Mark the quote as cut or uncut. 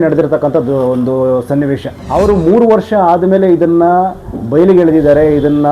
cut